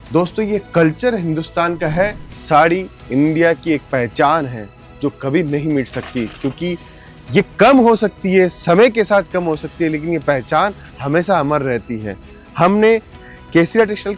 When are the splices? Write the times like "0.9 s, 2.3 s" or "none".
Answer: 2.2 s